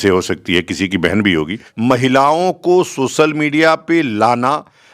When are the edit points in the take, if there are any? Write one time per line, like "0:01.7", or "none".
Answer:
0:01.6